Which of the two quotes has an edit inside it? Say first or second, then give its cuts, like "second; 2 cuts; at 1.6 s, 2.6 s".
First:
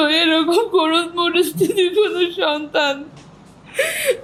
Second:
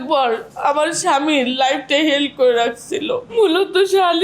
second; 1 cut; at 3.3 s